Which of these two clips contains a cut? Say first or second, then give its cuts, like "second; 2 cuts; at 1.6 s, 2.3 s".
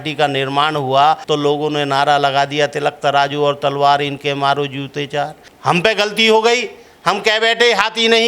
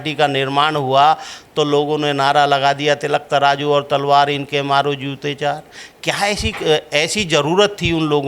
first; 2 cuts; at 1.2 s, 5.5 s